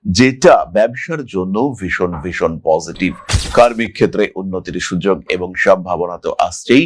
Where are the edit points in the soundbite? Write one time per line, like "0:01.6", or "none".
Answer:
none